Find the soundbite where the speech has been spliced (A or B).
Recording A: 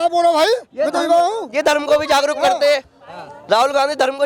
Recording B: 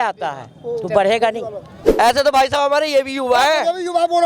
B